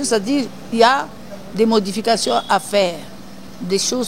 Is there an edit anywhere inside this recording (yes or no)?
no